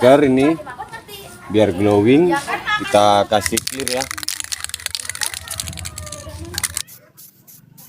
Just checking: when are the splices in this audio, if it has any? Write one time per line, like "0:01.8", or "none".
0:06.8